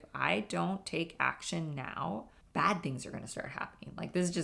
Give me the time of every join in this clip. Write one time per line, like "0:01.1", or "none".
0:02.4

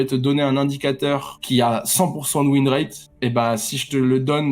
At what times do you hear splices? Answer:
0:01.3

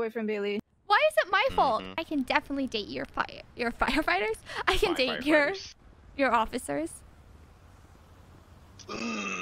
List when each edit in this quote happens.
0:02.0

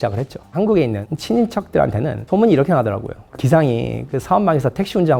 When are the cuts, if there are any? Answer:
none

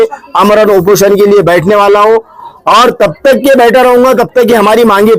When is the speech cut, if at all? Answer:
none

